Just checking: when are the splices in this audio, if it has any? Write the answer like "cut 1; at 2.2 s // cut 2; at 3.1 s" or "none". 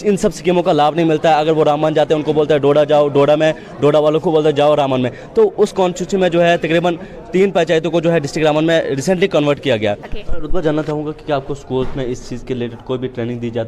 cut 1; at 10.1 s